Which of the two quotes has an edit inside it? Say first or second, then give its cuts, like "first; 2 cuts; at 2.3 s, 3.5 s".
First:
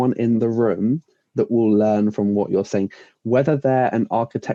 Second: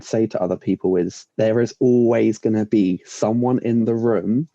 second; 1 cut; at 1.2 s